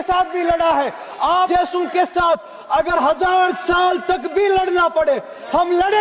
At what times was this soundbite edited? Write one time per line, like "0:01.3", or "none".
0:01.5